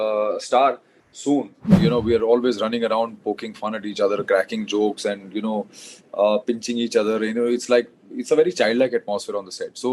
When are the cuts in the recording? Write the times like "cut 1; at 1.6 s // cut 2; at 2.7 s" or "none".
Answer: cut 1; at 1.7 s